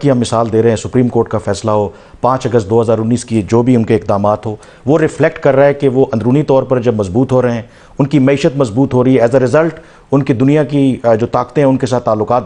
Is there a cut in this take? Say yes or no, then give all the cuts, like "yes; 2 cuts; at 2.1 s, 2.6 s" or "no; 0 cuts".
no; 0 cuts